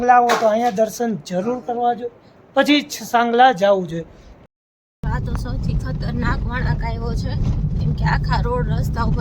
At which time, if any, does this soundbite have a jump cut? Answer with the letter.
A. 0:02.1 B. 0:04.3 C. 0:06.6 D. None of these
B